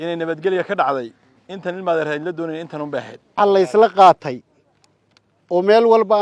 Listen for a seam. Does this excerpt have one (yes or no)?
yes